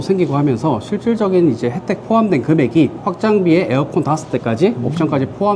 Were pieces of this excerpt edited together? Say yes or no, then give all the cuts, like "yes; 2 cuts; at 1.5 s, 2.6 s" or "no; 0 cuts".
no; 0 cuts